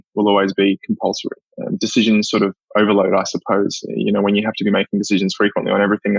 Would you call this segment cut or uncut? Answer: uncut